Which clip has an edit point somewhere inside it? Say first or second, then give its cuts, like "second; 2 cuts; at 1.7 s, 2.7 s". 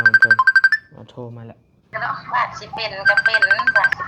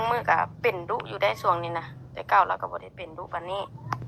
first; 1 cut; at 1.9 s